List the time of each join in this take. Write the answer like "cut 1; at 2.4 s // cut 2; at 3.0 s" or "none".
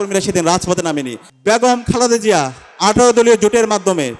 cut 1; at 1.2 s